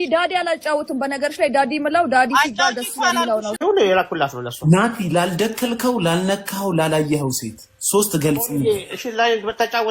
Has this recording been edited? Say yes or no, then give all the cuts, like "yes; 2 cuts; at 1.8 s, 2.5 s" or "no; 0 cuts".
yes; 1 cut; at 3.6 s